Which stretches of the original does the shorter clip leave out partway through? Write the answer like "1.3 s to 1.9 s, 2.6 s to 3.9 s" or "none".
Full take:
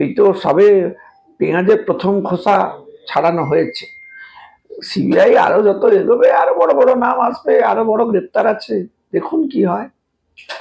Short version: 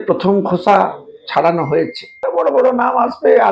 4.1 s to 6.5 s